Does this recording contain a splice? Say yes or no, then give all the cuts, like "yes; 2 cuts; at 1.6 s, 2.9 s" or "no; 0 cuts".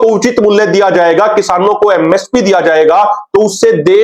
no; 0 cuts